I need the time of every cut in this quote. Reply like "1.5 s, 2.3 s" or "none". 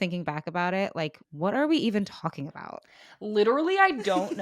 1.2 s